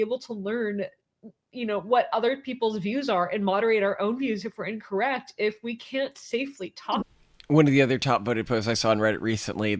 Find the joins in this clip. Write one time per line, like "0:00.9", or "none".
0:07.0